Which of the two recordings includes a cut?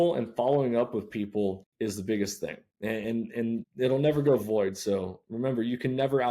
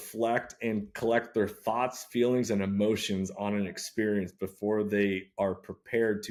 first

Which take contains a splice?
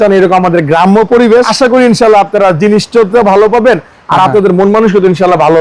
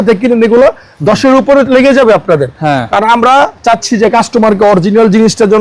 first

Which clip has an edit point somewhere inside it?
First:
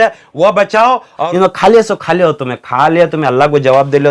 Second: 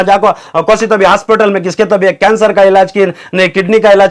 first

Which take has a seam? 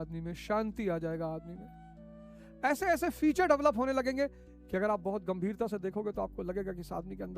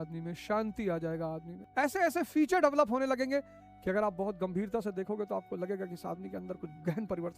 second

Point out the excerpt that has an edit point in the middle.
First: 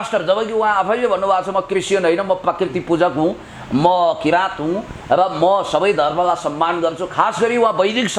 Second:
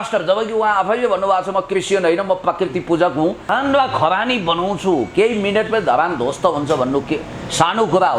second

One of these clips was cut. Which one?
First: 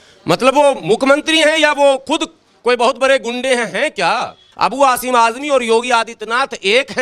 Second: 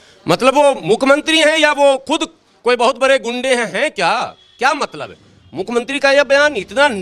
first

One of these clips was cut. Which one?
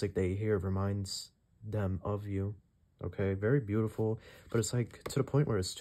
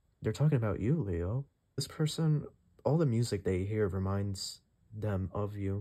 second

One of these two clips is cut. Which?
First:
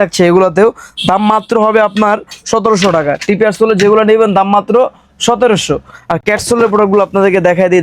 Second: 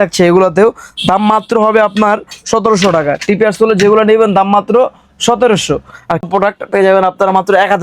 second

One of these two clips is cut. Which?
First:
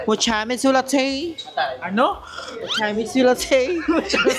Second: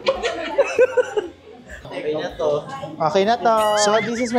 second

